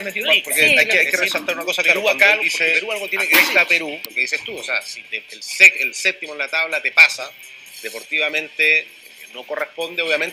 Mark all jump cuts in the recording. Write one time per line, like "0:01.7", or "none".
none

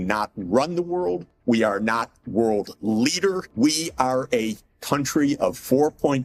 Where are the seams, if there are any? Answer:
0:01.3
0:03.5

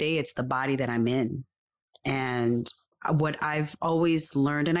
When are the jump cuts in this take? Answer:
0:02.9

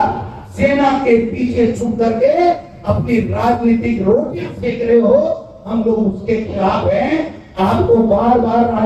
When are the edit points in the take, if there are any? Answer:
none

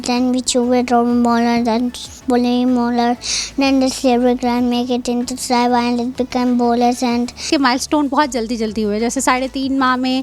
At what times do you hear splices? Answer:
0:07.5

